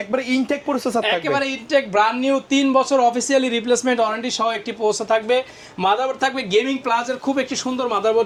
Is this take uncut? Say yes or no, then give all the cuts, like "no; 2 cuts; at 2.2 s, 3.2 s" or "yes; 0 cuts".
yes; 0 cuts